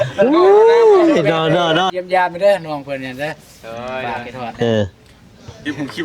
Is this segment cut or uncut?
cut